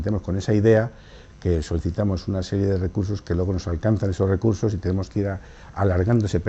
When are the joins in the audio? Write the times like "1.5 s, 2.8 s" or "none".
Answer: 3.4 s